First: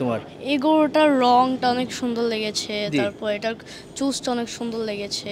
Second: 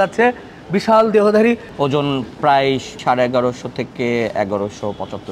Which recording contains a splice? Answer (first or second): second